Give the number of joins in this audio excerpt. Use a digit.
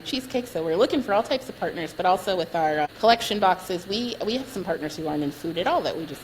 0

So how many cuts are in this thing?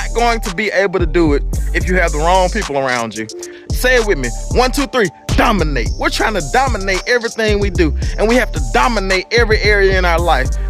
1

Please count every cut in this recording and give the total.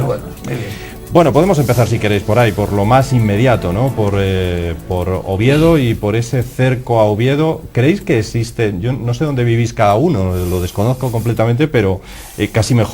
1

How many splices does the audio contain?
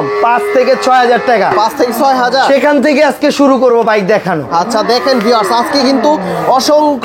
0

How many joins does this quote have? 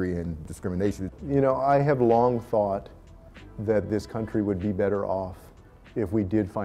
0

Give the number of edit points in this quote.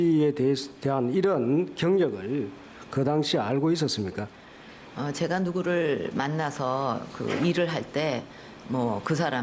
1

